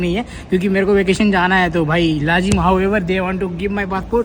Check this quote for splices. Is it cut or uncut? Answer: uncut